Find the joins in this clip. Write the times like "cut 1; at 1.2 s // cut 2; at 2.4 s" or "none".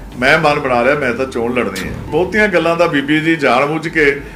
cut 1; at 2.1 s